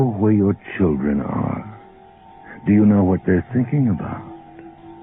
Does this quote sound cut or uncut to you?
cut